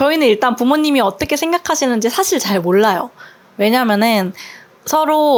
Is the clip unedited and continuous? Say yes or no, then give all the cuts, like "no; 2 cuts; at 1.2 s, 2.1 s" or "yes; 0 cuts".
yes; 0 cuts